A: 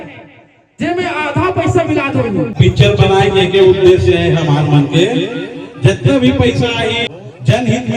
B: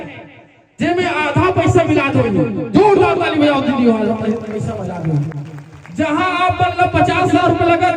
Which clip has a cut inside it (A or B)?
A